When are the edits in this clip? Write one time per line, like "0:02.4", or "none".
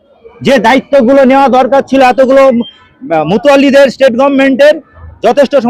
none